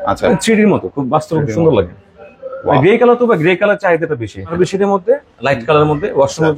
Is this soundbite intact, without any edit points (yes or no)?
no